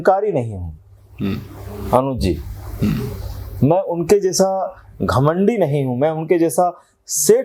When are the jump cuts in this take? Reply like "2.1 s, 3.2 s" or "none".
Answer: none